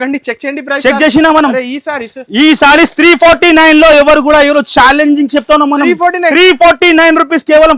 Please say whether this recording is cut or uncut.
uncut